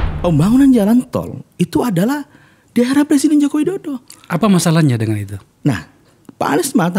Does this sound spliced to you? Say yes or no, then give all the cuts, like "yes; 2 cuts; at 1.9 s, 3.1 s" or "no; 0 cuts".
no; 0 cuts